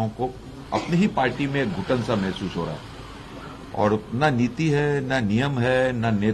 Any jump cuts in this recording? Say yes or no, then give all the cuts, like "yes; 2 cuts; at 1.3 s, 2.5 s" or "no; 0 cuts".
no; 0 cuts